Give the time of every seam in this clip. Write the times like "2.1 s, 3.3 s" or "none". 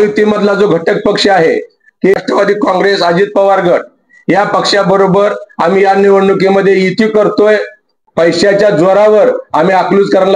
2.1 s, 8.0 s